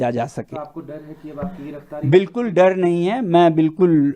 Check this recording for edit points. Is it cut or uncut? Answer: uncut